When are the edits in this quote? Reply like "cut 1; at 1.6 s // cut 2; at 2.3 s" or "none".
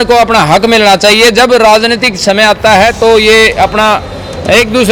none